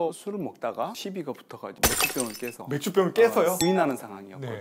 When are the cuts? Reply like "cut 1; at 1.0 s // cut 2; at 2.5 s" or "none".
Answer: cut 1; at 3.6 s